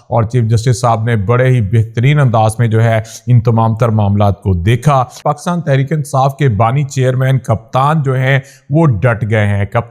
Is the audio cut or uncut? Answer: cut